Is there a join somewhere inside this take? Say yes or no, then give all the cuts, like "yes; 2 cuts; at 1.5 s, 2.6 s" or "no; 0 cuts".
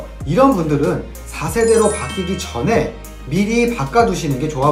no; 0 cuts